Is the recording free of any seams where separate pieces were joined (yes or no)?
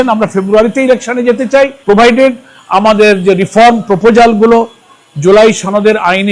no